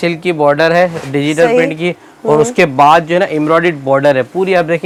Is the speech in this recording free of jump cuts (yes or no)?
yes